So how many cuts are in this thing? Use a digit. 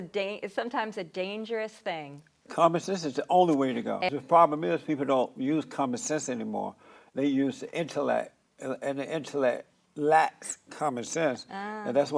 1